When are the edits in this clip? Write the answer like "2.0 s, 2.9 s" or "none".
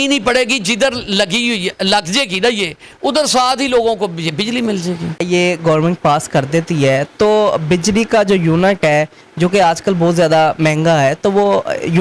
5.2 s